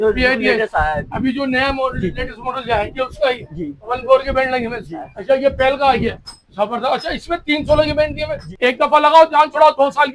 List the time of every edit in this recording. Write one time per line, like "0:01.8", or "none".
0:05.1
0:08.4